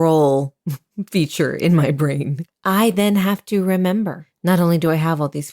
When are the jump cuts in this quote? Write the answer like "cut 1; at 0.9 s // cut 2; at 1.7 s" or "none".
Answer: cut 1; at 2.3 s // cut 2; at 4.3 s

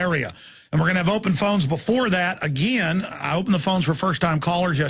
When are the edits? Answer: cut 1; at 2.4 s

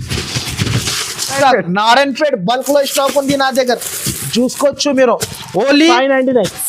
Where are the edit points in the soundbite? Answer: cut 1; at 1.4 s

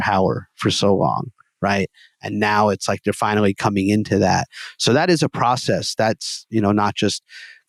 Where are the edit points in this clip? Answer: none

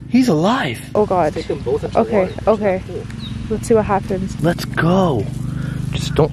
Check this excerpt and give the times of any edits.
cut 1; at 0.8 s // cut 2; at 4.3 s

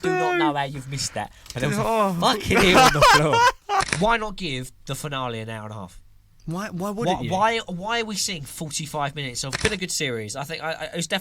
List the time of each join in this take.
cut 1; at 3.9 s // cut 2; at 9.6 s

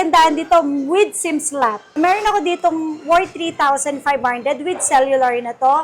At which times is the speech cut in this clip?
cut 1; at 2.0 s

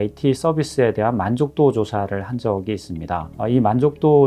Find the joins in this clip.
cut 1; at 3.3 s

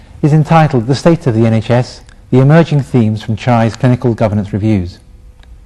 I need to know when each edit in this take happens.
cut 1; at 3.1 s

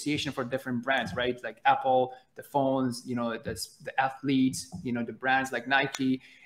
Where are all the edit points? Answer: none

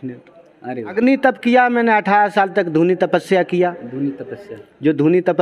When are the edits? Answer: cut 1; at 0.9 s

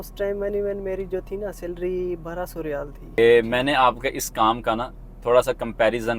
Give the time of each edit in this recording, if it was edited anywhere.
cut 1; at 3.2 s

